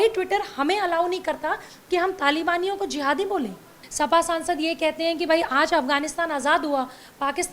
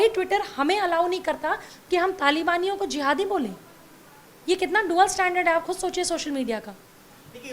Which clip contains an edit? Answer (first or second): first